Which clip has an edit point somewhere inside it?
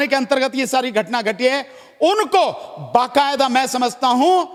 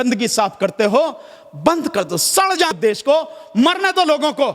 second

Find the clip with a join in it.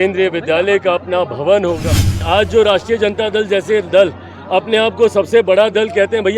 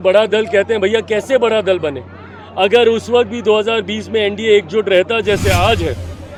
first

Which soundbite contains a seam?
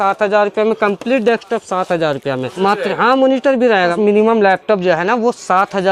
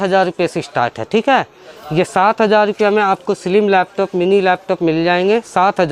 first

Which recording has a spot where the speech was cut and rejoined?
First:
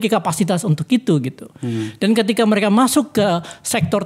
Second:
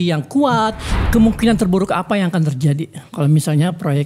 second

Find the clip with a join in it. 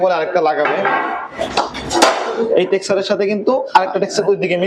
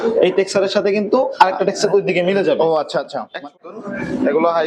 second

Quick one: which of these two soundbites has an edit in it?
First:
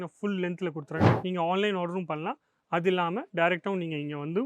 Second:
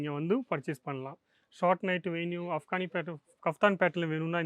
first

